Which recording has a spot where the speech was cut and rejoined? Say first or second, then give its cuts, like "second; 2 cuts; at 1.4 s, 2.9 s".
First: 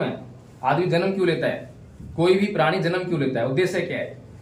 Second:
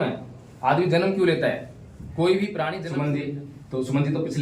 second; 1 cut; at 2.8 s